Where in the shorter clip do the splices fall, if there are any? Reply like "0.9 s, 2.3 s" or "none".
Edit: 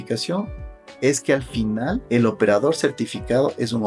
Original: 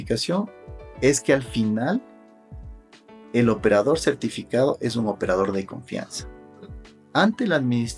2.0 s